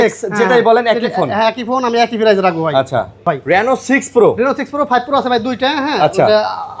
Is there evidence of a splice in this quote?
yes; 1 cut; at 3.2 s

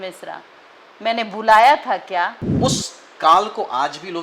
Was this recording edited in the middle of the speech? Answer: yes; 1 cut; at 2.4 s

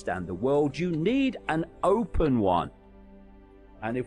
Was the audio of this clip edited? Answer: yes; 1 cut; at 3.1 s

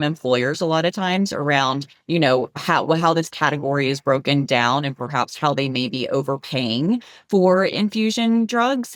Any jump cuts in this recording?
no; 0 cuts

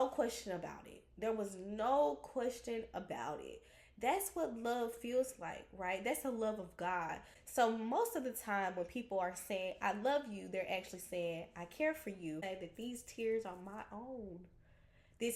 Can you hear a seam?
yes; 2 cuts; at 7.3 s, 12.4 s

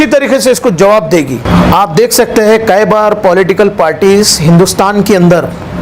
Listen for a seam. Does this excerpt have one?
no; 0 cuts

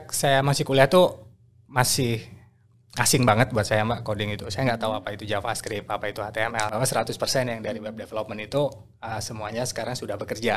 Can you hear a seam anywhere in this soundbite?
yes; 1 cut; at 6.7 s

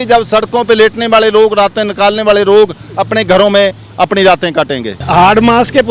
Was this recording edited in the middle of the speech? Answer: yes; 1 cut; at 5.0 s

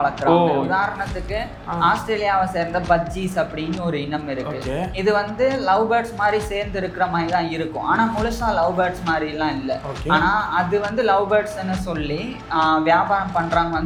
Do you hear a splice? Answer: no; 0 cuts

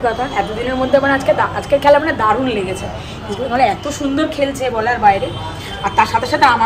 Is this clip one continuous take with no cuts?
yes; 0 cuts

